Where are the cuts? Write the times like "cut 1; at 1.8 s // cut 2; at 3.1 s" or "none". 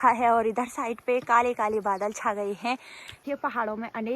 cut 1; at 3.2 s